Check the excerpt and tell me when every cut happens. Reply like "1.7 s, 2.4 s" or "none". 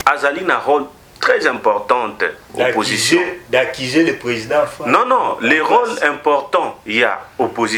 none